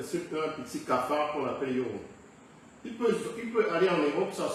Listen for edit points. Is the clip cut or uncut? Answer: uncut